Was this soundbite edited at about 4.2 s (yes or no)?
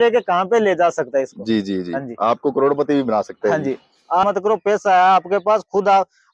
yes